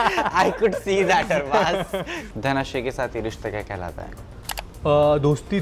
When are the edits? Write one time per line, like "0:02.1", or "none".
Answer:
0:02.2